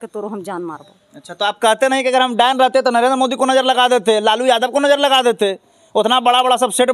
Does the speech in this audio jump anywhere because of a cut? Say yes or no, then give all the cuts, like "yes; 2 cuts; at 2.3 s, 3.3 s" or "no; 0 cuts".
no; 0 cuts